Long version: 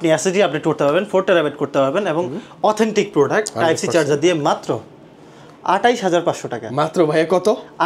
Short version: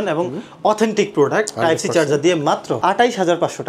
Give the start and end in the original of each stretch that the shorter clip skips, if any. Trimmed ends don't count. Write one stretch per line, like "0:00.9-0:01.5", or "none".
0:04.8-0:05.6